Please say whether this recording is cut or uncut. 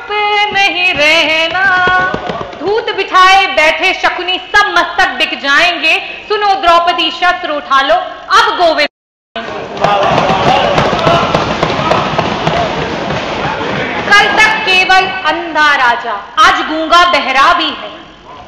cut